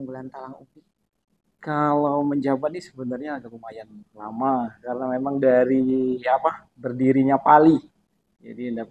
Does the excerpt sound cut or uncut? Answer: uncut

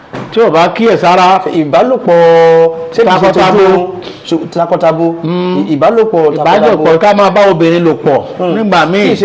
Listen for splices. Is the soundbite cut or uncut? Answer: uncut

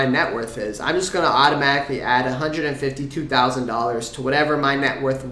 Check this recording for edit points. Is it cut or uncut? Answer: uncut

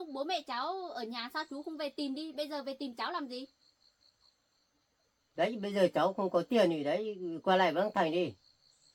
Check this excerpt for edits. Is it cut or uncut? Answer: uncut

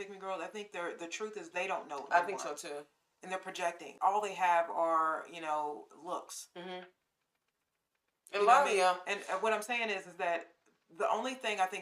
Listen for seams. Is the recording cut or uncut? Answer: cut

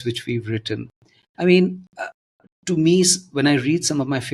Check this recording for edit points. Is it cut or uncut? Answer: uncut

